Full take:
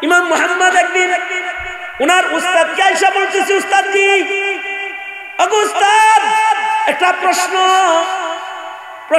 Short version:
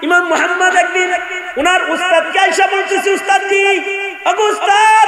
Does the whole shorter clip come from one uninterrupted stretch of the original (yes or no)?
no